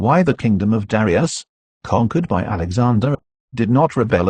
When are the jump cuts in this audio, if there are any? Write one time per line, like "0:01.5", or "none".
none